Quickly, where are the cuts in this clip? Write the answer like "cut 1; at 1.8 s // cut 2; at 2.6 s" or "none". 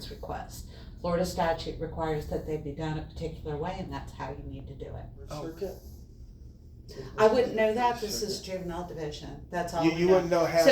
cut 1; at 5.3 s